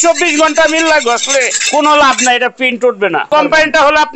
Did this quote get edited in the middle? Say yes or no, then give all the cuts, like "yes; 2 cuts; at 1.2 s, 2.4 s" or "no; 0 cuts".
yes; 2 cuts; at 1.6 s, 3.3 s